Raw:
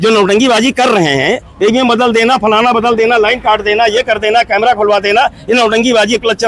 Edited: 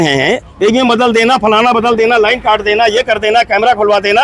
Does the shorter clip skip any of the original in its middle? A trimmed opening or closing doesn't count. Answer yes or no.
no